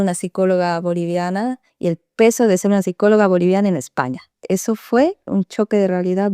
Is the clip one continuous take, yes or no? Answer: no